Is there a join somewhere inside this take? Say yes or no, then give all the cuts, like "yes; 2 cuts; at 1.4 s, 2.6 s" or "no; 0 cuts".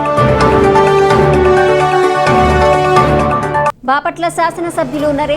yes; 1 cut; at 1.2 s